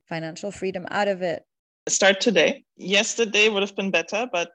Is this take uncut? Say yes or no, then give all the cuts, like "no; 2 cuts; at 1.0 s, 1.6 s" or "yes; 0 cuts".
no; 2 cuts; at 1.8 s, 2.7 s